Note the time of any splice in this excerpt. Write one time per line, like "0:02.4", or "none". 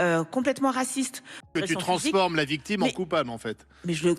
0:01.5